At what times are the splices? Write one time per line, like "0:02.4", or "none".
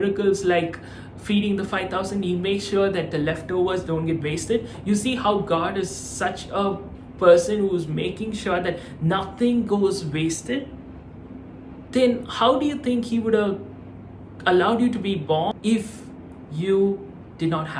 0:15.5